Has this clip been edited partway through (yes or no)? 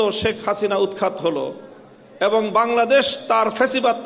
no